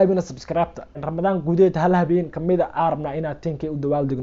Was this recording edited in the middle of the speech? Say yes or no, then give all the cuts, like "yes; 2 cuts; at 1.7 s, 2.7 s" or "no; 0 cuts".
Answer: yes; 1 cut; at 1.0 s